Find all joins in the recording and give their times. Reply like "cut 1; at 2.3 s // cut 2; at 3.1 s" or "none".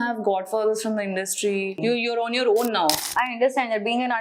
cut 1; at 1.8 s // cut 2; at 3.0 s